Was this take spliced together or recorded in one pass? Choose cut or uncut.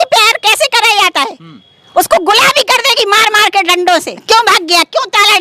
cut